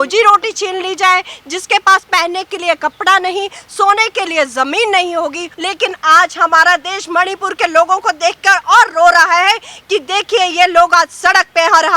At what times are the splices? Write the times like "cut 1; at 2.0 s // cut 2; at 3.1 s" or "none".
cut 1; at 5.5 s